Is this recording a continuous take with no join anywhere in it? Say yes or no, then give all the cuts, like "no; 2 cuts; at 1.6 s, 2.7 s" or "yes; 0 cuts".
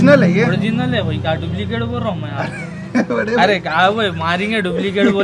yes; 0 cuts